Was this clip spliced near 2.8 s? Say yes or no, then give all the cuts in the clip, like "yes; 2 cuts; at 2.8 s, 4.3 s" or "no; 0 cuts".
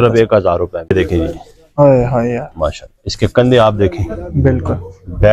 no; 1 cut; at 0.9 s